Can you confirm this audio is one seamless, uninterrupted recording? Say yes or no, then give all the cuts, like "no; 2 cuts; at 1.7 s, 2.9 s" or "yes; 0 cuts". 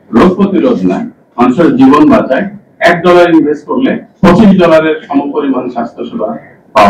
yes; 0 cuts